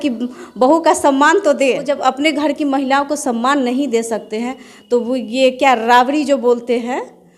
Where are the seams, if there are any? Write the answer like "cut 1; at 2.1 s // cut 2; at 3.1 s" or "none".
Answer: cut 1; at 1.9 s